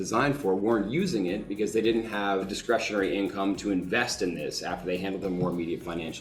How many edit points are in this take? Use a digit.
1